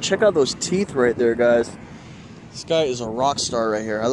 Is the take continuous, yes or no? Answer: yes